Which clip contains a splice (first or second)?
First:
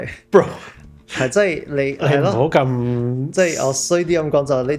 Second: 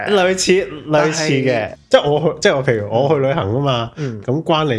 second